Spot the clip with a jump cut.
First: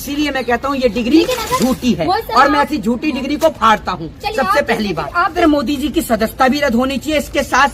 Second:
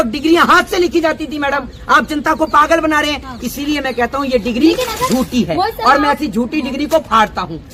first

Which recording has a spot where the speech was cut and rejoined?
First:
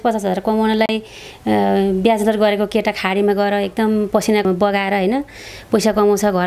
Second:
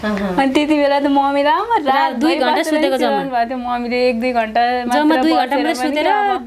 first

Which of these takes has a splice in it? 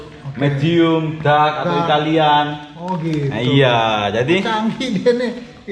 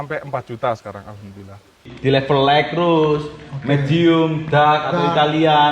second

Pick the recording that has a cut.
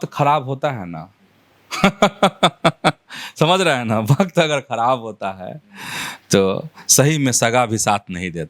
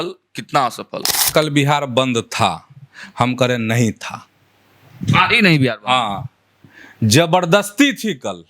second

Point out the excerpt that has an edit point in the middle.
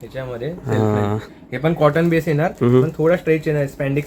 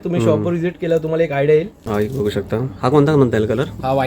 second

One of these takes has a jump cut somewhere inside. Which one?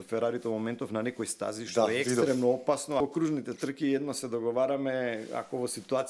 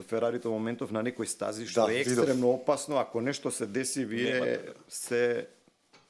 first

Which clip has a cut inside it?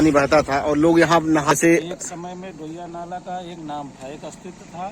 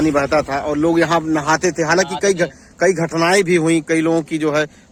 first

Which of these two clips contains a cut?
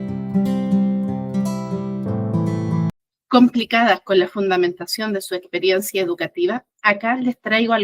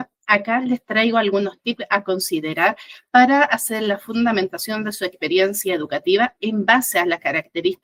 first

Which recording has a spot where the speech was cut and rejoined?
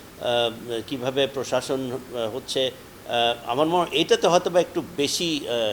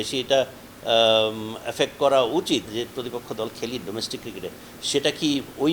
second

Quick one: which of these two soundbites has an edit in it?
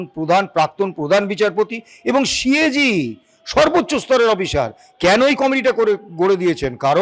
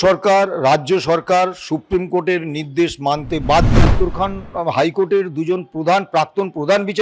second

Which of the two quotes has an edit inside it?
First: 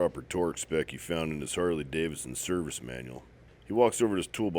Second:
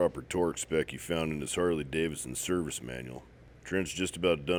first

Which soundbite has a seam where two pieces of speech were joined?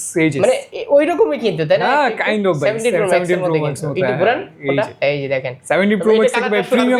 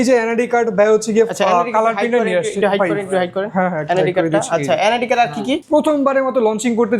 second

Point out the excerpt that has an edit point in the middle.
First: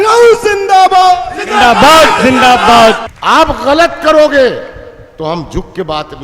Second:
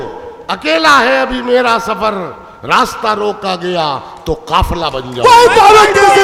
first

